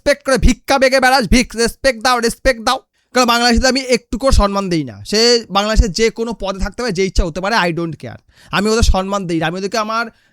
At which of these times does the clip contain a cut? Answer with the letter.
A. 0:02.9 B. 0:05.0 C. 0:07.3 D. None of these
A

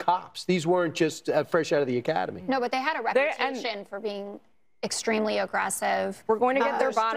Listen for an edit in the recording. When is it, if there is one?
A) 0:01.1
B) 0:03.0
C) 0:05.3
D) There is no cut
A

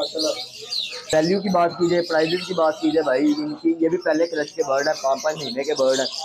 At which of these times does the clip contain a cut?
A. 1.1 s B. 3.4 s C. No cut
A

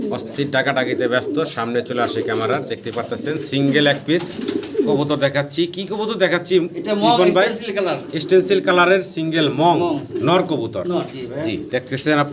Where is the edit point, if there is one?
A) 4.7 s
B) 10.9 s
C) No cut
C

